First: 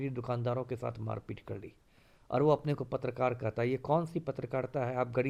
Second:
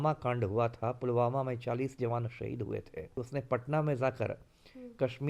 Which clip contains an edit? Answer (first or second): second